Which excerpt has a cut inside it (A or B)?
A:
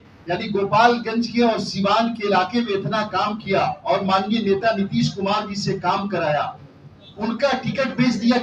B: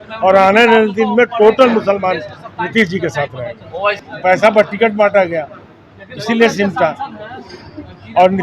B